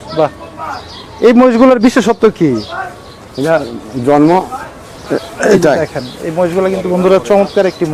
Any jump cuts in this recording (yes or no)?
no